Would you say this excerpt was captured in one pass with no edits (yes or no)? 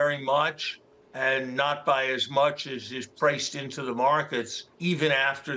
no